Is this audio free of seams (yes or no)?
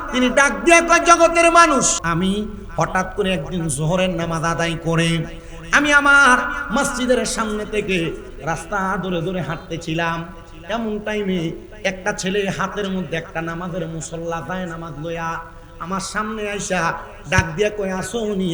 no